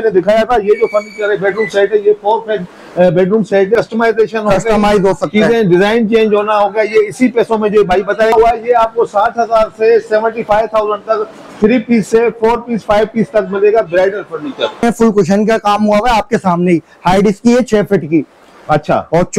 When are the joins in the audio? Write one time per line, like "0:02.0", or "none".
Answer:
0:03.8
0:08.3
0:14.8

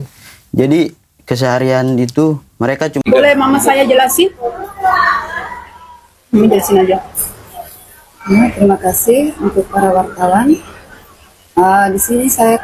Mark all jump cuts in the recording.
0:03.0

